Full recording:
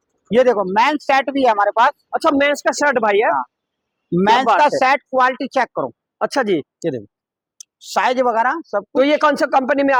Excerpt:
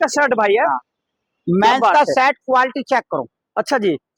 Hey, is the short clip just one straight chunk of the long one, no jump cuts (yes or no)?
yes